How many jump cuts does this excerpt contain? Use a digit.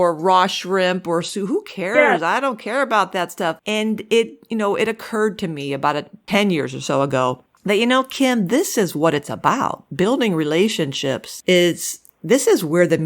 3